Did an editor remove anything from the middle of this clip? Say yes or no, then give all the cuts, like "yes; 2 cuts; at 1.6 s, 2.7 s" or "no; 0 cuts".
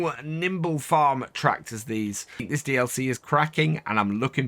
yes; 1 cut; at 2.5 s